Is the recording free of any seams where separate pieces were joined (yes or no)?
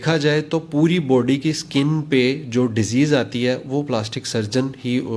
yes